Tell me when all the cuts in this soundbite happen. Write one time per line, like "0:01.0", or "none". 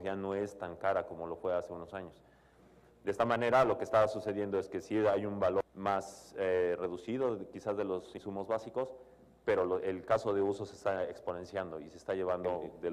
0:05.7